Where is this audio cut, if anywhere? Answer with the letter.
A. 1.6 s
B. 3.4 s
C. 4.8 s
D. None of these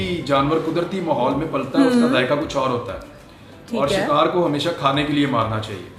D